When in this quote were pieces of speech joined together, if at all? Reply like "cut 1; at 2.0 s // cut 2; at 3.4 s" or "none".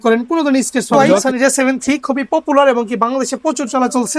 cut 1; at 0.9 s